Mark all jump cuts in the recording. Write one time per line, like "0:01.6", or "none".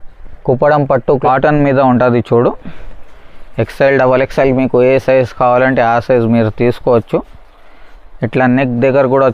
0:01.2